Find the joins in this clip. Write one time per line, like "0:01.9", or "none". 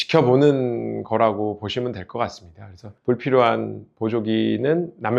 none

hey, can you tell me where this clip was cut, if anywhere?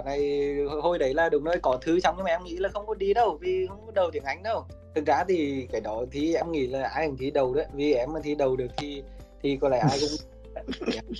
0:04.8

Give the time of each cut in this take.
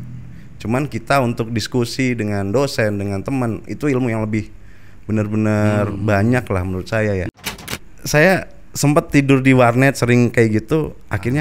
0:07.6

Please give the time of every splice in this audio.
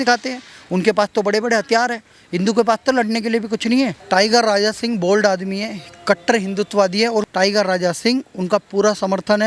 0:04.0
0:07.3

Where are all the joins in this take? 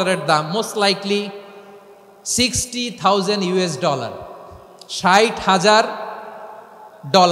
none

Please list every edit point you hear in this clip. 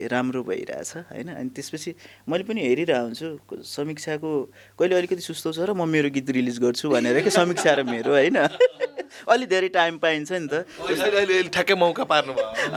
none

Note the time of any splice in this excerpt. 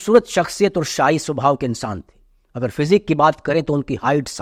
none

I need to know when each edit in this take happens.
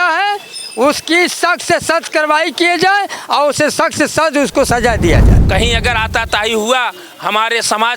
0:05.3

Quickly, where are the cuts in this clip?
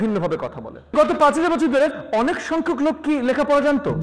0:00.9

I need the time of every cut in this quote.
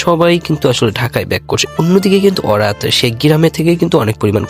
0:01.7

